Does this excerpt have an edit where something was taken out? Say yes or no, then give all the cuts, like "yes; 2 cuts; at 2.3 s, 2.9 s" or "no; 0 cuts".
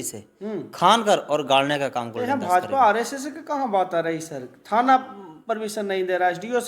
no; 0 cuts